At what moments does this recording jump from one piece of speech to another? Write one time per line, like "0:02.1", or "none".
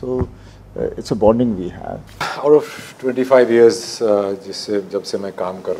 0:02.3